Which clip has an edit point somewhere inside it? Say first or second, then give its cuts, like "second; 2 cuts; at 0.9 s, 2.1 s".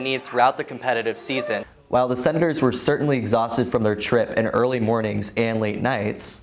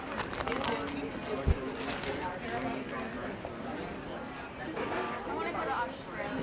first; 1 cut; at 1.7 s